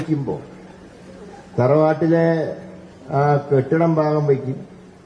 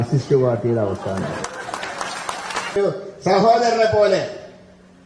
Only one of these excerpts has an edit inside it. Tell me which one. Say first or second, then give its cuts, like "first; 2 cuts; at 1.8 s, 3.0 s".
second; 1 cut; at 2.8 s